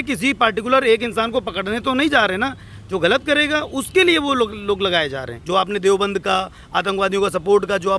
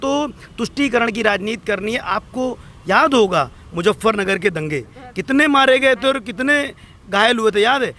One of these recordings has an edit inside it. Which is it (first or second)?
first